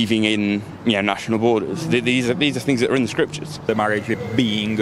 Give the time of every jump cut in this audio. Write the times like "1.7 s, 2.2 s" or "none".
3.6 s